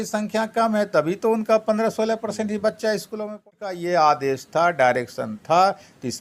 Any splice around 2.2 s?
no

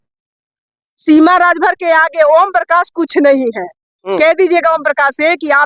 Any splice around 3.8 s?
no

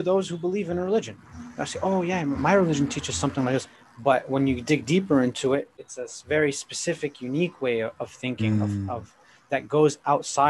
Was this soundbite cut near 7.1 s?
no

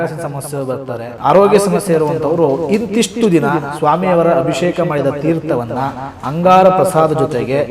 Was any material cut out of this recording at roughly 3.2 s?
no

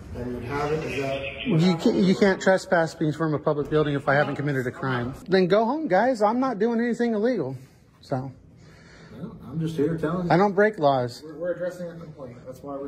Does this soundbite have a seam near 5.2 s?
yes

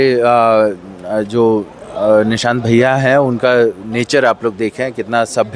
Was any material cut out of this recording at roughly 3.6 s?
no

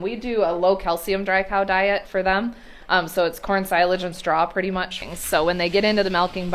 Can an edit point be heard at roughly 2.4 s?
no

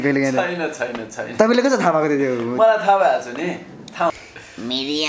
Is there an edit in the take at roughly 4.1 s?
yes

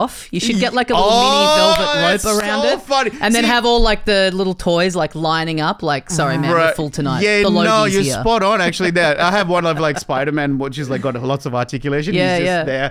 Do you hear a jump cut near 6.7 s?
no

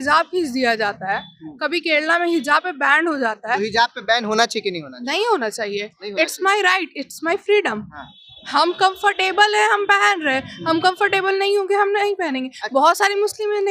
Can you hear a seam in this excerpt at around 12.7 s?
no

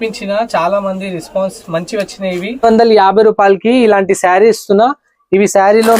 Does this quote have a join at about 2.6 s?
yes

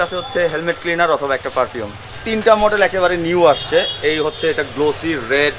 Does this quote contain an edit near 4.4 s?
no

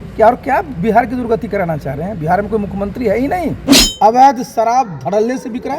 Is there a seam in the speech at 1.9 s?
no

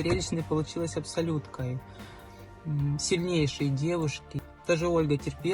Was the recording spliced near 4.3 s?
yes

